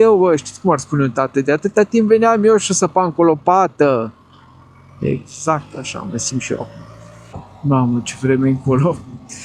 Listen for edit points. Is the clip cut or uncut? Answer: uncut